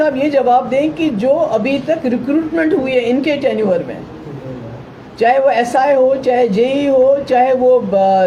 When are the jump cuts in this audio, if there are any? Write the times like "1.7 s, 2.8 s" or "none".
none